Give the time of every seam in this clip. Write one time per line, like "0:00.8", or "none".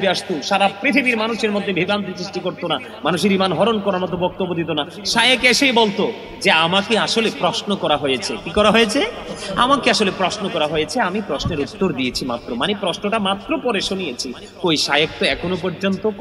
none